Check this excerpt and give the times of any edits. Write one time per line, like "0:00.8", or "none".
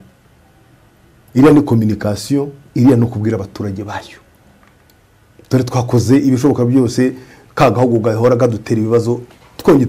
none